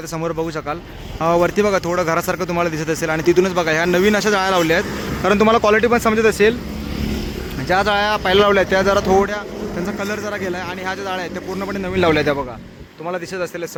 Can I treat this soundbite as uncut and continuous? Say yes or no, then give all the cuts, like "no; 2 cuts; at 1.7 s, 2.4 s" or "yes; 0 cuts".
yes; 0 cuts